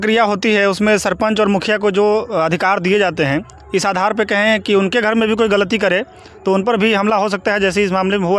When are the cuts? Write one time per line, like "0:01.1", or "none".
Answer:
none